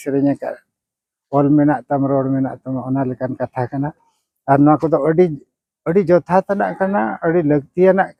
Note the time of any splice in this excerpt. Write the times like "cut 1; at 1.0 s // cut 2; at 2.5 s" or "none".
none